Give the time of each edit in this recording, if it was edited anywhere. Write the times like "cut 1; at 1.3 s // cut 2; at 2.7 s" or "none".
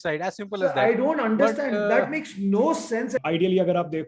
cut 1; at 3.2 s